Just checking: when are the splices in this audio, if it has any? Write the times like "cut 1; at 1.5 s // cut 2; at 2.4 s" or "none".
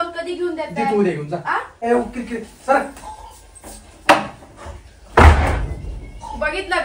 cut 1; at 1.8 s